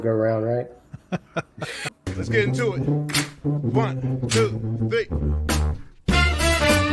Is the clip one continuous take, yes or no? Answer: no